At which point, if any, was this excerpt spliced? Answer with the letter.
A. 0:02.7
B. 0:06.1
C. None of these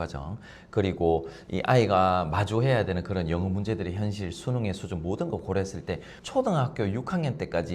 B